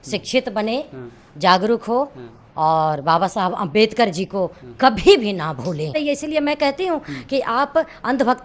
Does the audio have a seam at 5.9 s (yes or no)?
yes